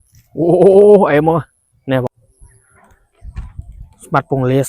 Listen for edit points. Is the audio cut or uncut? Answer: cut